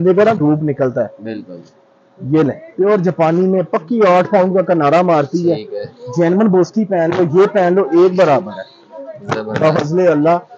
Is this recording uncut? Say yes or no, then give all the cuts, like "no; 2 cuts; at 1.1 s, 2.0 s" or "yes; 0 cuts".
yes; 0 cuts